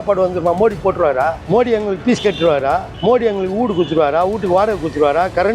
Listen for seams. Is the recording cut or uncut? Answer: cut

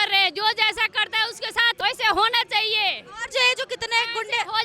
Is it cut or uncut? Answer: cut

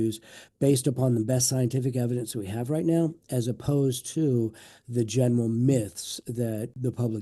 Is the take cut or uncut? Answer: uncut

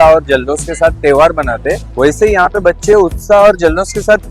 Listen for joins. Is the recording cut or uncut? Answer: uncut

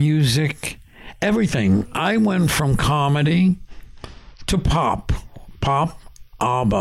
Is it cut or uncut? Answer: cut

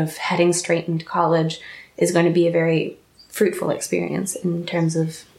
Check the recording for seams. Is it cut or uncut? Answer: uncut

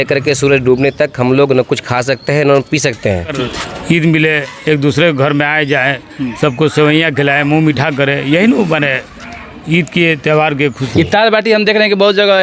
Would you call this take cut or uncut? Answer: cut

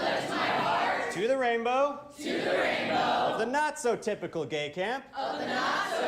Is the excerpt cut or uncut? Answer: uncut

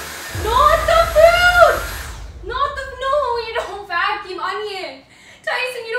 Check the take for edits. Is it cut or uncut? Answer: uncut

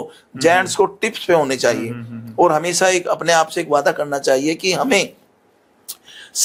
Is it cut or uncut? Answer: uncut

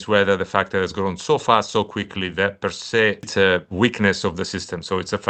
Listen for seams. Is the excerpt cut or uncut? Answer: cut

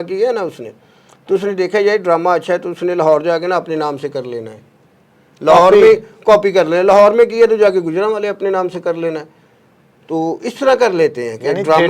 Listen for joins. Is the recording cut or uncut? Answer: uncut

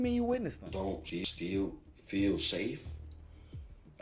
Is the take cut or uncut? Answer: uncut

